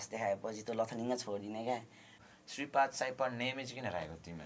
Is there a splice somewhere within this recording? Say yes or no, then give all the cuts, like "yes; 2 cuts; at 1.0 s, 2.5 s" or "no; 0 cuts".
yes; 1 cut; at 2.2 s